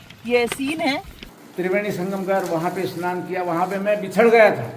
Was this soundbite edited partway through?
yes; 1 cut; at 1.2 s

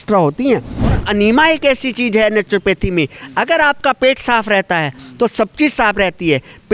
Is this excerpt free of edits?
no; 1 cut; at 1.0 s

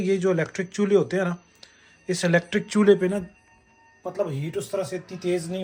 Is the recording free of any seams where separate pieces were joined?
yes; 0 cuts

